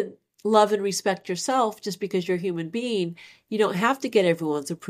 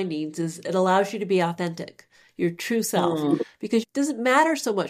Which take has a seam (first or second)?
second